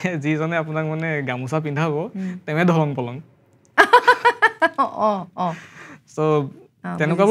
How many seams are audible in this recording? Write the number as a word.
zero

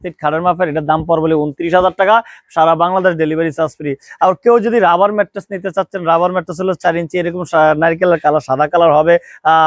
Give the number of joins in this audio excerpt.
zero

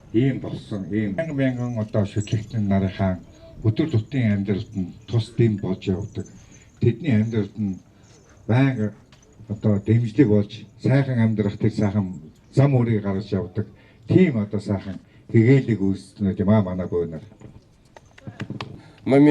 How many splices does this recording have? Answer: one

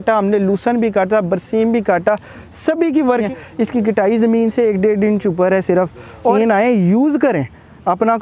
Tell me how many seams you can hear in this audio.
two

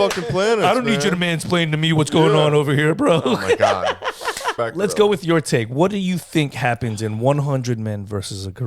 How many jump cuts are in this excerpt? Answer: one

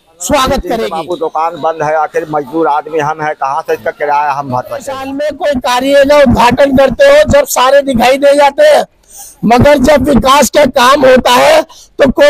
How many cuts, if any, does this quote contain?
two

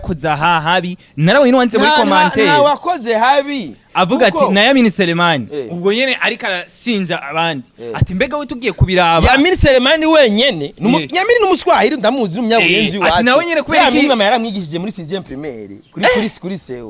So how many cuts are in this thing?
zero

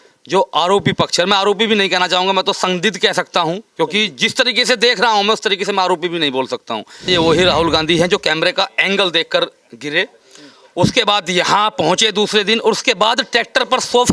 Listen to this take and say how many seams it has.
one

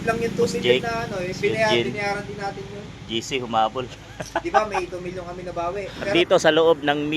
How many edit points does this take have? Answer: one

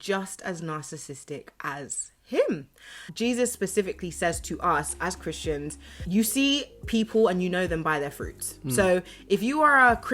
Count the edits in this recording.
zero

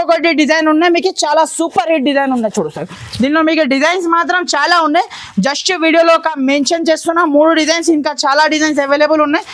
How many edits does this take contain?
zero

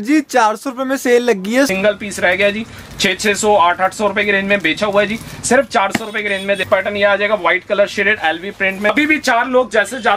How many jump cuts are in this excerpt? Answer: three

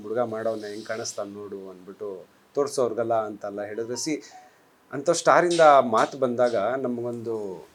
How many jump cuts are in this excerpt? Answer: zero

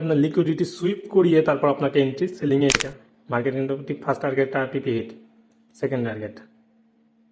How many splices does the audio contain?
one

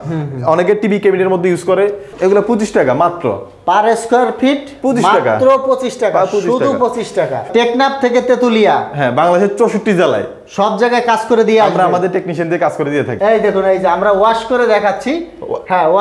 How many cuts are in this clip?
three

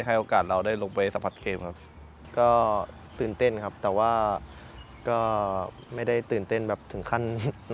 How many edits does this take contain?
zero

